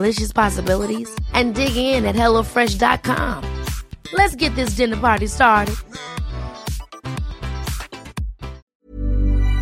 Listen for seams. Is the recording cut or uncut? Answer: cut